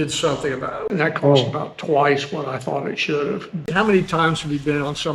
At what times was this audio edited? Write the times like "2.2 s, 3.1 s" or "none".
0.8 s, 3.5 s